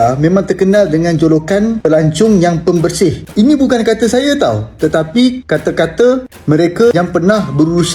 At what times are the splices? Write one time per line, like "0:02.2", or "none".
0:03.2